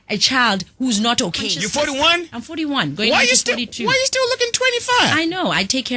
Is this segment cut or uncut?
cut